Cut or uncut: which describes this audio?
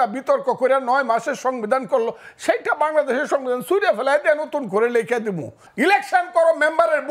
cut